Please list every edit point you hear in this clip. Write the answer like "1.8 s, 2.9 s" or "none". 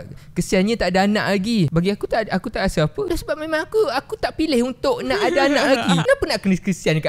1.7 s, 3.1 s, 6.0 s